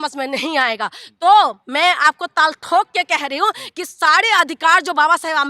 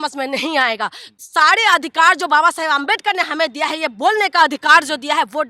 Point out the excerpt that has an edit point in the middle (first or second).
second